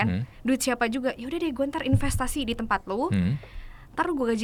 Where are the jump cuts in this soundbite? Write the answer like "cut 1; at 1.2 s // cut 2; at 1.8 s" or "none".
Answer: none